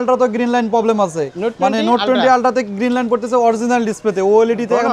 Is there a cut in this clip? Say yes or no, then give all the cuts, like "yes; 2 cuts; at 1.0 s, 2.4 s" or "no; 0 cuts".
yes; 1 cut; at 1.3 s